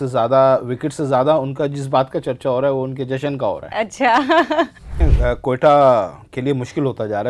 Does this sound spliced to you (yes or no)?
yes